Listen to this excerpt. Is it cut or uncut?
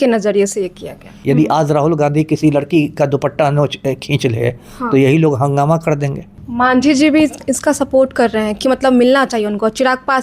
cut